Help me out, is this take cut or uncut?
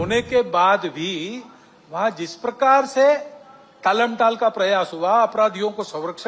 uncut